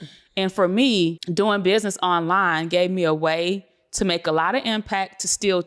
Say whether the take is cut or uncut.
cut